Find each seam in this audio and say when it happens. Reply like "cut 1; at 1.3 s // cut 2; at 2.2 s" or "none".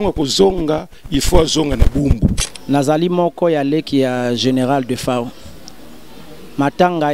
cut 1; at 2.4 s